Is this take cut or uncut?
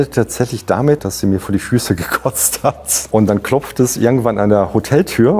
cut